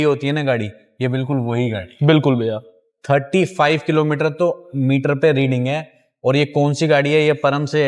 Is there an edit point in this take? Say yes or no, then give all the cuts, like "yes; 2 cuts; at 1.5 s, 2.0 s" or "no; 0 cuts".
no; 0 cuts